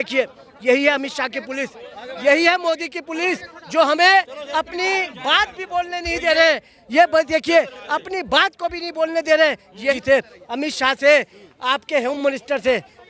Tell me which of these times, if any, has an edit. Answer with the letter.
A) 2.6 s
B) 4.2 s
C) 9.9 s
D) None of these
C